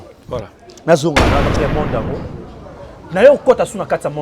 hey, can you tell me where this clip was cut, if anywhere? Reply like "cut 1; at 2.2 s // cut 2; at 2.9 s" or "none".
cut 1; at 1.5 s

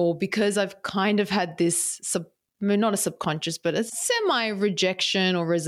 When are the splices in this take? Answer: cut 1; at 4.0 s

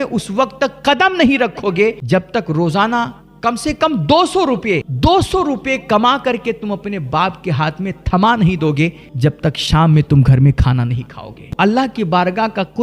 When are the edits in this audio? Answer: cut 1; at 2.0 s // cut 2; at 4.9 s // cut 3; at 9.0 s // cut 4; at 11.5 s

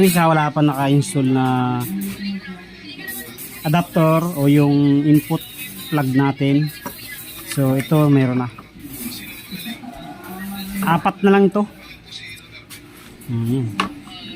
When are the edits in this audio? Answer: none

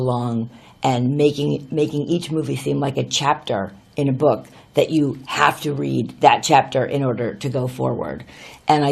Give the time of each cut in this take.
cut 1; at 5.6 s

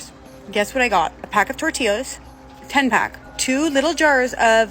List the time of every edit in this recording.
cut 1; at 1.2 s // cut 2; at 3.3 s

